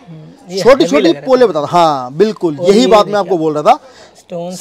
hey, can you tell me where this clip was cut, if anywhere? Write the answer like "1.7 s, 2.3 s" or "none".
none